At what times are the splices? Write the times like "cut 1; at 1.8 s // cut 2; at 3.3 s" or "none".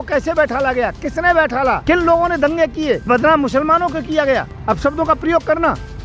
cut 1; at 1.8 s // cut 2; at 3.1 s // cut 3; at 4.5 s